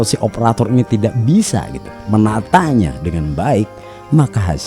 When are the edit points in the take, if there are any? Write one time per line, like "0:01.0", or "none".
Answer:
none